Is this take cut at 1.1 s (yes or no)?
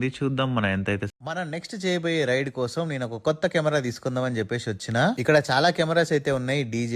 yes